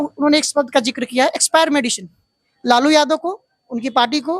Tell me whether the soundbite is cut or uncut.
uncut